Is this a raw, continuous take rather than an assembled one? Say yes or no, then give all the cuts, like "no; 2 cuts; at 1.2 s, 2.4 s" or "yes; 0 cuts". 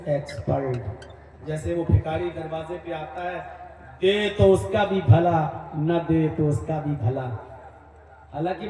yes; 0 cuts